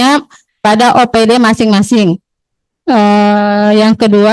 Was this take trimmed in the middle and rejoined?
no; 0 cuts

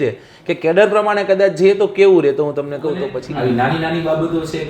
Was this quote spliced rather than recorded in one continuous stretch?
yes; 1 cut; at 3.2 s

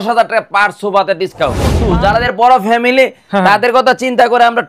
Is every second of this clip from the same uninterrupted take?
no; 1 cut; at 1.8 s

